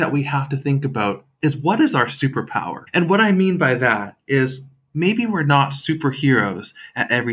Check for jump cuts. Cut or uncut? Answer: cut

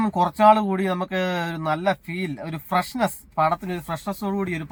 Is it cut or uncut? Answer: uncut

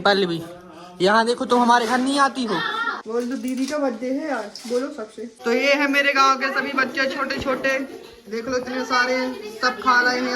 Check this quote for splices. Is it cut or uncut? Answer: cut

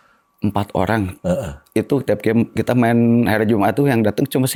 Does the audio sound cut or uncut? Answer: uncut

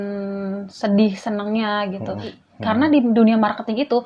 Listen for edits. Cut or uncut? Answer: cut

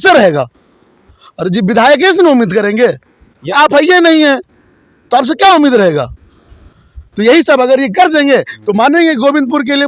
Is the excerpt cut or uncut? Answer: uncut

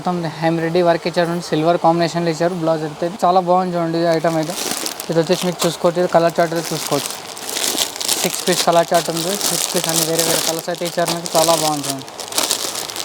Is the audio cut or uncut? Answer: uncut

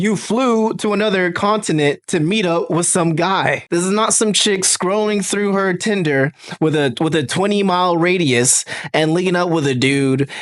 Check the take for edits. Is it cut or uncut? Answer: cut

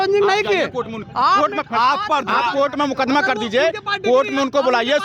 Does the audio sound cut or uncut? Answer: uncut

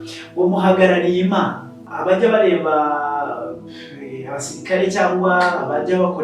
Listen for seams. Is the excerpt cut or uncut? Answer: cut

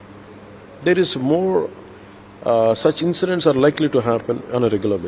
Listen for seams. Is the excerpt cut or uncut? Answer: uncut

